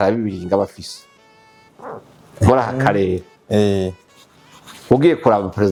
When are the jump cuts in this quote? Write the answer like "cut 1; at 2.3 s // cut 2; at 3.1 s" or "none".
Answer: none